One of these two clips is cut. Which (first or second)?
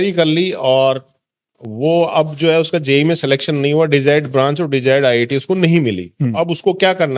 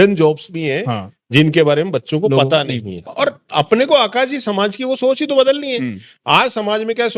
second